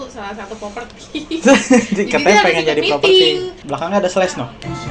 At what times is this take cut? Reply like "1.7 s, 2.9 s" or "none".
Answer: 3.6 s

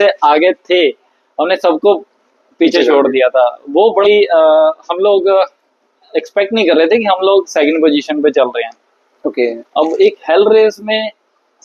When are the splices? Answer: 4.0 s, 9.6 s

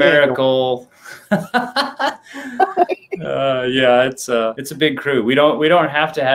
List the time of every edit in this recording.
2.9 s, 4.6 s

